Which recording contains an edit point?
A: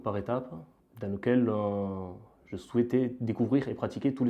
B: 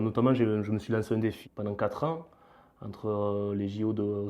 B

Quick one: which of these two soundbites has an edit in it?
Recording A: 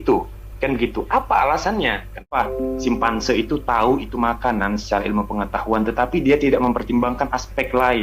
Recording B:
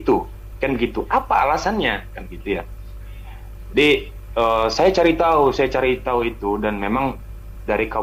A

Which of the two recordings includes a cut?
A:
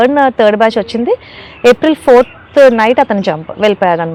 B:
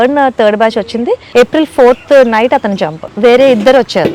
B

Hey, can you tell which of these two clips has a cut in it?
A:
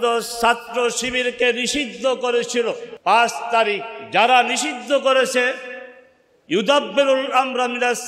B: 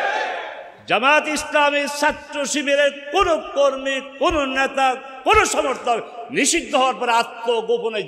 A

